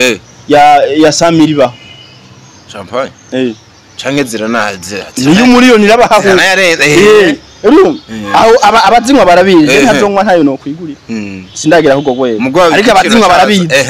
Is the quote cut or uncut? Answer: uncut